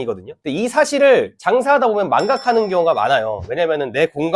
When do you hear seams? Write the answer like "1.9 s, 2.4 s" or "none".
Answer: none